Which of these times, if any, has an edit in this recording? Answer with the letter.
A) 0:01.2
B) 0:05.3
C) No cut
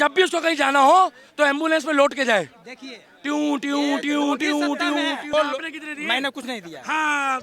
B